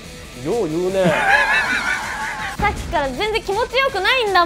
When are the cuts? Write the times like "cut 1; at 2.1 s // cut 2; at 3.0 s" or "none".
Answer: cut 1; at 2.4 s